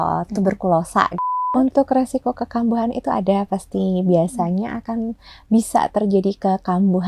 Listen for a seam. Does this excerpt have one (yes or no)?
yes